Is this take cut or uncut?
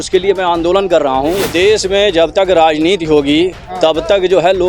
cut